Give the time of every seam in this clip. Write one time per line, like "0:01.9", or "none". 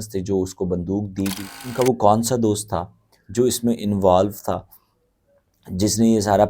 0:01.6